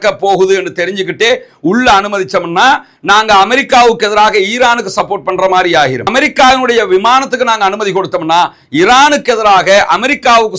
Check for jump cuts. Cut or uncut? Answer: uncut